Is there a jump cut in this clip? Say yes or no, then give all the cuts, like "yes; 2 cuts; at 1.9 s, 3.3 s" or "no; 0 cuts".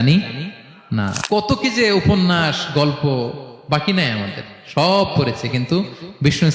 yes; 1 cut; at 1.2 s